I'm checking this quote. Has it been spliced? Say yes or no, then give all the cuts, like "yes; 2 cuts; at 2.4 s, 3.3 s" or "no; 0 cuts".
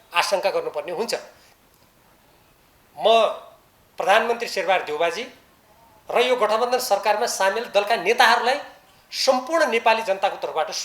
yes; 1 cut; at 1.4 s